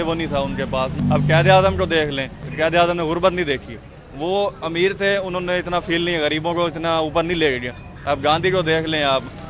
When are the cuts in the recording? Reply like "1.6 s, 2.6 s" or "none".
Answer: 1.0 s, 2.4 s